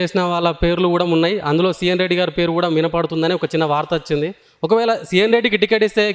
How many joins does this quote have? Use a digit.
0